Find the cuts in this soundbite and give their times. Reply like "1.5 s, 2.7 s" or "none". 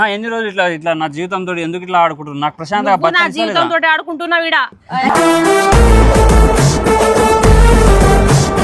none